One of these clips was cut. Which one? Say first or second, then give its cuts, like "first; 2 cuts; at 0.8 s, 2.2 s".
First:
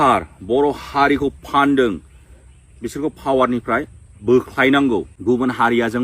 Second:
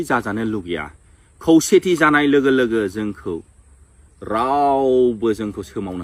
first; 1 cut; at 5.1 s